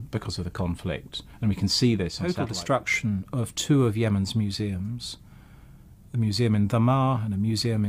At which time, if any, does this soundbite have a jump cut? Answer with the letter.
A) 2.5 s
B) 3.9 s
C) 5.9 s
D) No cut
A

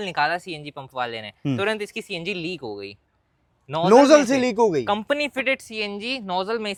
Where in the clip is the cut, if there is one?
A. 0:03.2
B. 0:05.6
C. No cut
C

